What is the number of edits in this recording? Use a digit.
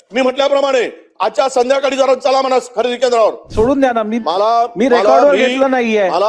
1